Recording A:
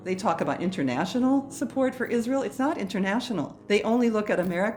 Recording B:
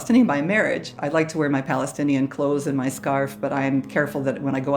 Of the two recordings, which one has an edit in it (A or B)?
B